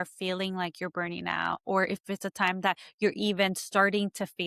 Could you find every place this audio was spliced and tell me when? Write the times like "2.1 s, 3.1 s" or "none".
none